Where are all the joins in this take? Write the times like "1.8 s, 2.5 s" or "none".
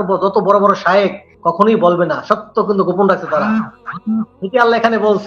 1.3 s, 4.4 s